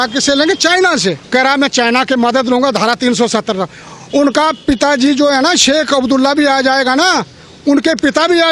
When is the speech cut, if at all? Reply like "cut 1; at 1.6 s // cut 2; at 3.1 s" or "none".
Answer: cut 1; at 1.2 s